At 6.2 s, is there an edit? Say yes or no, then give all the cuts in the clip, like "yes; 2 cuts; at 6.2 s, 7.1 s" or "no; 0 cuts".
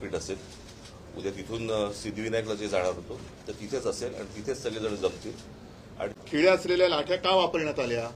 yes; 1 cut; at 6.2 s